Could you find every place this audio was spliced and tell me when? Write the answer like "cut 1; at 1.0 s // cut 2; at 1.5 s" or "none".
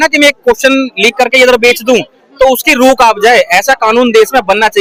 none